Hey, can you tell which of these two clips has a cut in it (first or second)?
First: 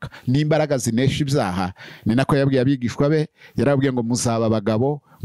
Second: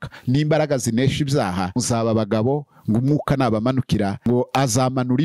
second